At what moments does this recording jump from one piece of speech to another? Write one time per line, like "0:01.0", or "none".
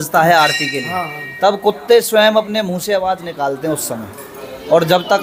none